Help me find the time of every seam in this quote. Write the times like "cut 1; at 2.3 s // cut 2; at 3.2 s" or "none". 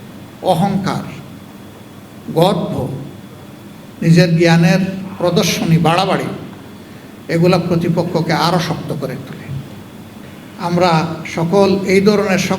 cut 1; at 10.2 s